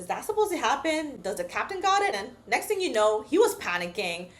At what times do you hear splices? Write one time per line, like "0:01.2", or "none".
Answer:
0:02.3